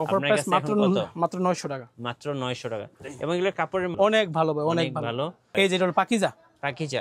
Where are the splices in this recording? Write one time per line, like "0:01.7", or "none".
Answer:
0:03.9
0:05.4

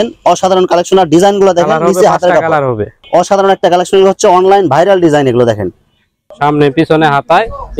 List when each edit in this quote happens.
0:03.0
0:06.2

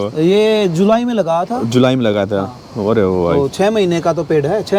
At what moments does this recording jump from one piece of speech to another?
none

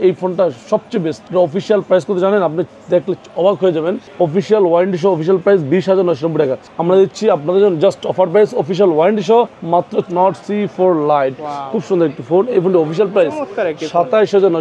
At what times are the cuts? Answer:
0:01.2
0:04.0
0:06.7
0:10.1

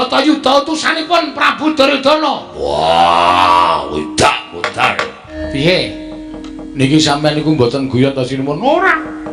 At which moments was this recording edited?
0:05.2

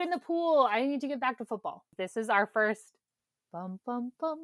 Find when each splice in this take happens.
0:01.9

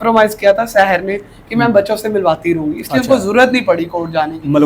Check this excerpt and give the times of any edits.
none

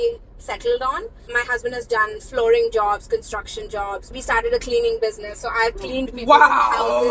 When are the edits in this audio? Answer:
0:01.2
0:04.1

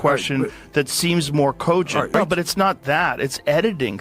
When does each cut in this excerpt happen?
0:02.1

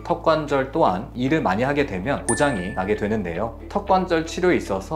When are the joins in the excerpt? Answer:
0:03.6

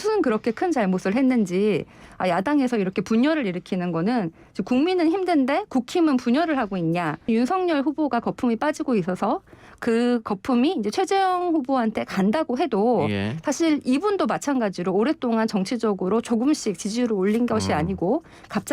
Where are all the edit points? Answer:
0:07.3

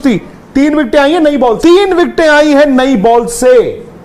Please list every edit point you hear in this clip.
0:01.6

